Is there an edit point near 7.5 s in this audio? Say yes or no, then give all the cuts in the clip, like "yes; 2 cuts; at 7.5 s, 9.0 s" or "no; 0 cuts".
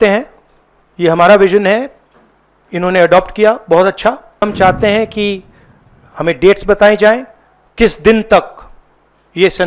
no; 1 cut; at 4.4 s